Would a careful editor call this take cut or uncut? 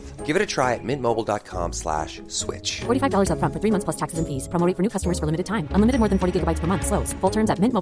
uncut